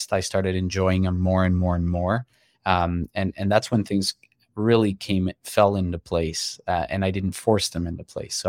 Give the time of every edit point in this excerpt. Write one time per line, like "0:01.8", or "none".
none